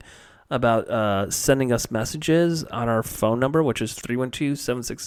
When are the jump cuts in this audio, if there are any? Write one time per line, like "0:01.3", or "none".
none